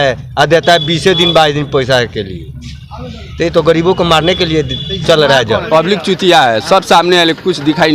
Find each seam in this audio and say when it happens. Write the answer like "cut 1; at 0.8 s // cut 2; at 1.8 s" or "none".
cut 1; at 5.6 s